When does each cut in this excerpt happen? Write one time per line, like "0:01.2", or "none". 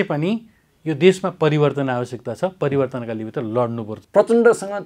0:03.9